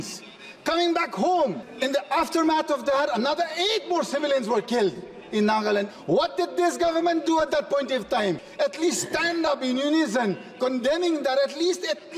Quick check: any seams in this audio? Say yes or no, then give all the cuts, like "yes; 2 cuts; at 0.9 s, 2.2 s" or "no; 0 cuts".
yes; 3 cuts; at 1.6 s, 5.9 s, 8.5 s